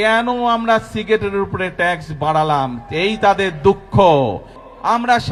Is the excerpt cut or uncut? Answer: uncut